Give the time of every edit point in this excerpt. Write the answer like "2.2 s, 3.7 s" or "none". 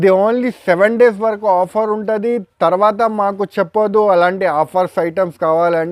none